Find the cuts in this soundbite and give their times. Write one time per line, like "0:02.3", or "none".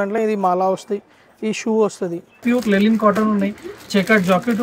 0:02.4